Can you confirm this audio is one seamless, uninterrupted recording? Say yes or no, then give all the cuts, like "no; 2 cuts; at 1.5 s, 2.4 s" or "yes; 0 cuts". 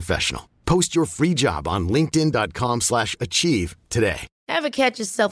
yes; 0 cuts